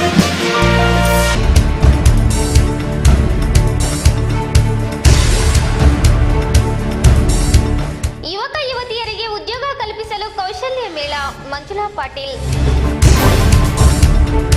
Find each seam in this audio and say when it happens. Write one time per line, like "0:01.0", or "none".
0:00.9